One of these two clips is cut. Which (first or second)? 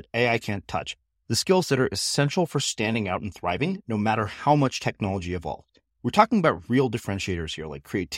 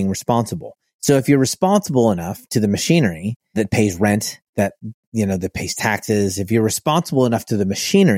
second